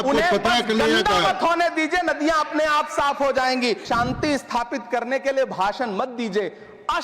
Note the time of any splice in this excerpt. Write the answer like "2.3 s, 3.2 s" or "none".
3.8 s